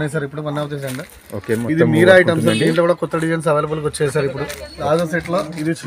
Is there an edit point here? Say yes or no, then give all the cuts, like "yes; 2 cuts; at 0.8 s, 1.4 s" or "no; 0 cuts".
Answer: yes; 1 cut; at 4.8 s